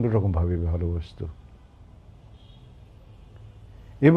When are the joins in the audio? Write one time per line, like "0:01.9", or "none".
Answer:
none